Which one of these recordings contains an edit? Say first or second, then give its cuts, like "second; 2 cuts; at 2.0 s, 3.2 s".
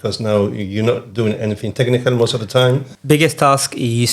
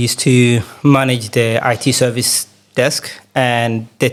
first; 1 cut; at 2.9 s